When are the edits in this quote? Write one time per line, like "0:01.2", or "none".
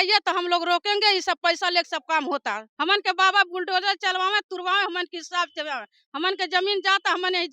0:02.7